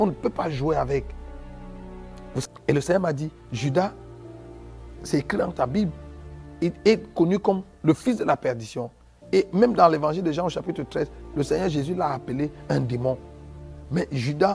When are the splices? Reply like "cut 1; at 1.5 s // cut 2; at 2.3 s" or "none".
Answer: cut 1; at 2.4 s